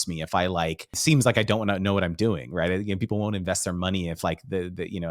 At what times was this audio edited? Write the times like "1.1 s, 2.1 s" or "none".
0.9 s